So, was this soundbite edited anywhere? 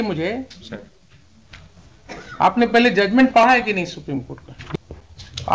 yes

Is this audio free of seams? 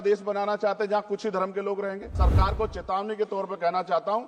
no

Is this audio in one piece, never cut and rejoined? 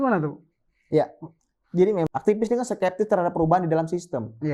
no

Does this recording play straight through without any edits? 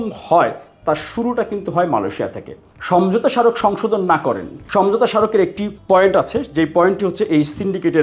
no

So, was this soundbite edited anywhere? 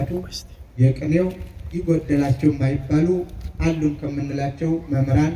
no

